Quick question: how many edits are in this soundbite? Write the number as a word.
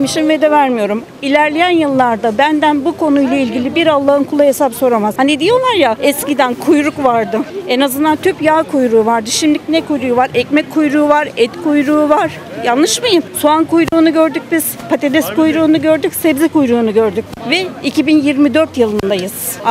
zero